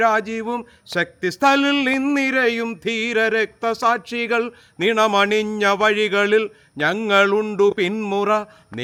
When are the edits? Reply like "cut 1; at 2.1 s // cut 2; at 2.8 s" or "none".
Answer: none